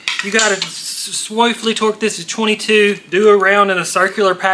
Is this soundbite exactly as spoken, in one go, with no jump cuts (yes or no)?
yes